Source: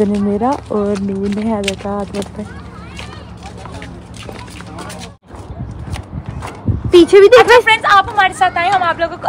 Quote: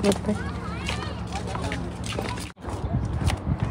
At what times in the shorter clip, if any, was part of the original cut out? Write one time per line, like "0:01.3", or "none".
0:02.5